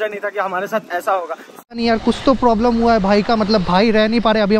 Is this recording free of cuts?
no; 1 cut; at 1.8 s

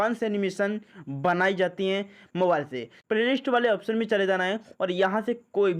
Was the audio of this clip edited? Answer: yes; 1 cut; at 2.9 s

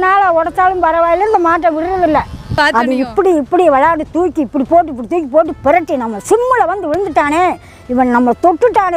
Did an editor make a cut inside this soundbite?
yes; 1 cut; at 2.5 s

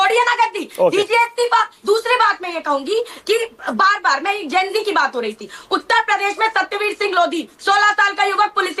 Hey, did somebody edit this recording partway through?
yes; 1 cut; at 1.7 s

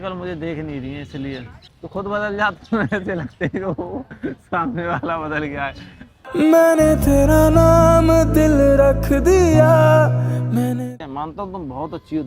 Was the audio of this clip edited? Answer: yes; 2 cuts; at 1.6 s, 11.0 s

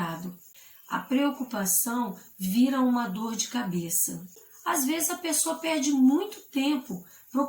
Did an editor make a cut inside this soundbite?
yes; 1 cut; at 4.5 s

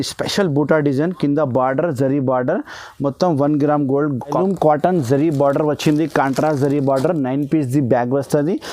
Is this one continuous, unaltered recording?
no; 1 cut; at 4.4 s

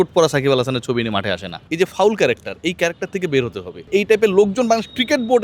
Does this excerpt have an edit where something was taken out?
yes; 2 cuts; at 1.6 s, 3.8 s

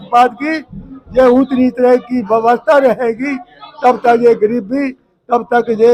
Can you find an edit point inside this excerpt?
no; 0 cuts

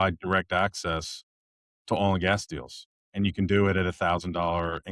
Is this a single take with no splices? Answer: yes; 0 cuts

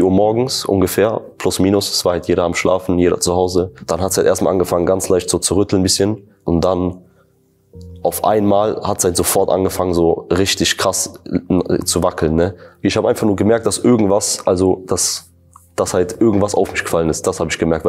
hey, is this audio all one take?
no; 3 cuts; at 3.8 s, 6.3 s, 12.7 s

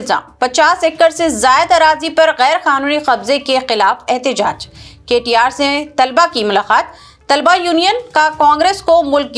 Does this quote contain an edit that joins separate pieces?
no; 0 cuts

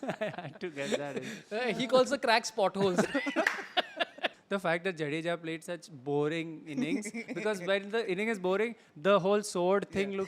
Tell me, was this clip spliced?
yes; 1 cut; at 4.4 s

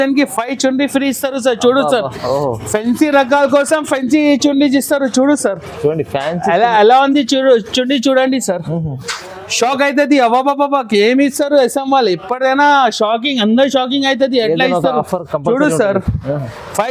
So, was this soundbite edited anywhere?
no; 0 cuts

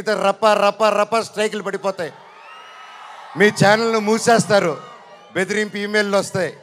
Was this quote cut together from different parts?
no; 0 cuts

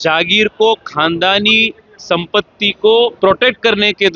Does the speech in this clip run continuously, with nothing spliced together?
no; 1 cut; at 3.2 s

